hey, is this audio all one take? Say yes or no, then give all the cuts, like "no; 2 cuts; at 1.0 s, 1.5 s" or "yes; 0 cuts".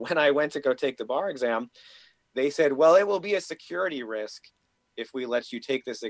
yes; 0 cuts